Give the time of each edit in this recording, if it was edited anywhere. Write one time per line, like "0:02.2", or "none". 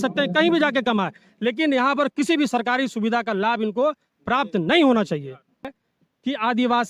0:05.8